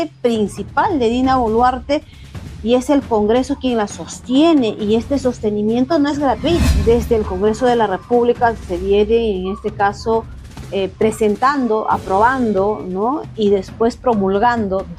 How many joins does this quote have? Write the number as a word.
one